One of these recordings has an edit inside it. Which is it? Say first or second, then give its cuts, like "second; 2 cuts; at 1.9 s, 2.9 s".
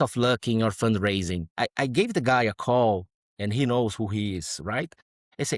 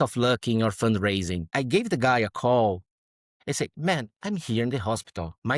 second; 2 cuts; at 1.5 s, 3.1 s